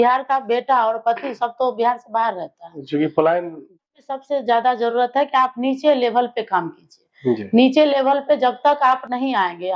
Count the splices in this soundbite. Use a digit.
1